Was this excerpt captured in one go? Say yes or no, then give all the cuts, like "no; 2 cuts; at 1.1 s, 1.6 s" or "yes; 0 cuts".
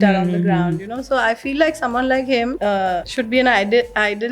no; 1 cut; at 3.0 s